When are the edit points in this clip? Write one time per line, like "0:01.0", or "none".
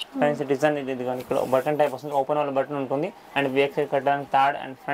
none